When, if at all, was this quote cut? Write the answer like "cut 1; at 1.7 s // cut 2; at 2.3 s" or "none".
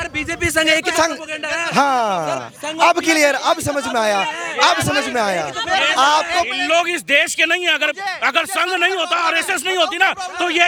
none